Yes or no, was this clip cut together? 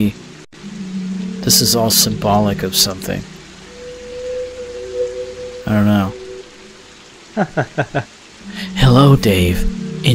no